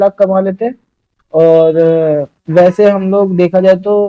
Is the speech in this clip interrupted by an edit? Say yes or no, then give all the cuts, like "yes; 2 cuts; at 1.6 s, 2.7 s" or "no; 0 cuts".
no; 0 cuts